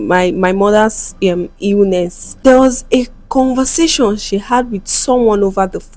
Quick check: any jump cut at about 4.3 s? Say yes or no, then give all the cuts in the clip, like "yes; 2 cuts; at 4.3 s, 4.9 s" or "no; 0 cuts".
no; 1 cut; at 2.2 s